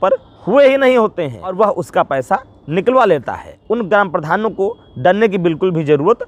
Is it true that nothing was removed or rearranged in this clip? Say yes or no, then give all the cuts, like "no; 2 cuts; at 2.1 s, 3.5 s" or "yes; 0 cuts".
no; 2 cuts; at 1.5 s, 3.5 s